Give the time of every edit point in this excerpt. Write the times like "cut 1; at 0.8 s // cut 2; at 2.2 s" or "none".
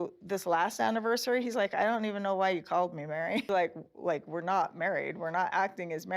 cut 1; at 3.5 s